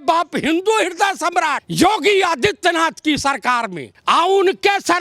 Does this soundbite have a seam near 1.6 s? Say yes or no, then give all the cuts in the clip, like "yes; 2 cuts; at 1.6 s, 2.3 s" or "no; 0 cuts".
yes; 2 cuts; at 1.6 s, 3.9 s